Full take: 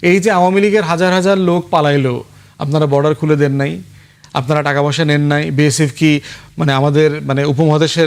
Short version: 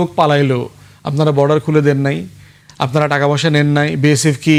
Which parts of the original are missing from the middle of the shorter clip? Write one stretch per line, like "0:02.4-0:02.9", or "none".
none